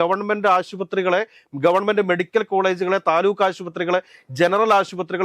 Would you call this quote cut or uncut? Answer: uncut